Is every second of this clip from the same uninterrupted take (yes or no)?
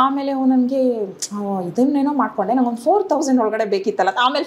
yes